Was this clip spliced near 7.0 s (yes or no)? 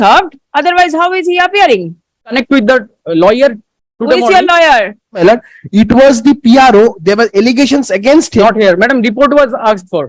no